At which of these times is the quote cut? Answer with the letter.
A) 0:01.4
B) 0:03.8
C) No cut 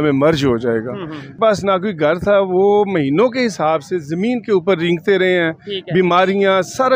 A